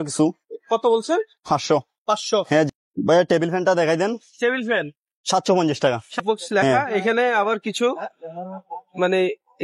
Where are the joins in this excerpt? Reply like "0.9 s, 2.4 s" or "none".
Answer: 2.7 s, 6.2 s

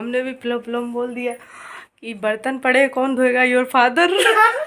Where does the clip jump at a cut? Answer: none

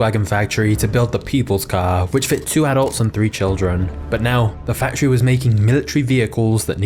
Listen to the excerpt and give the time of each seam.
none

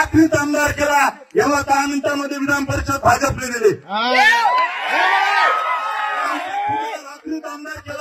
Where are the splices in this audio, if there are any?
none

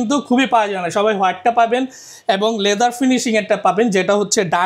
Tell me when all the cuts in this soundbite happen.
none

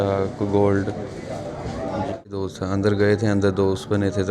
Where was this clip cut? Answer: 2.3 s

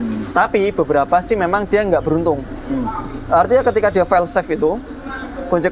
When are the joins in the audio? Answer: none

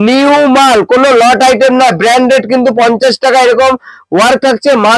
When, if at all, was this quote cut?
none

